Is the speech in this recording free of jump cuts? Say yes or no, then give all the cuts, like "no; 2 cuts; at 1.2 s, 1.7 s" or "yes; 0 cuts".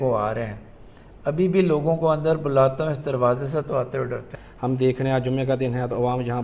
no; 1 cut; at 4.4 s